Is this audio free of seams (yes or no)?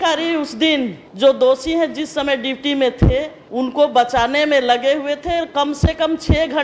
no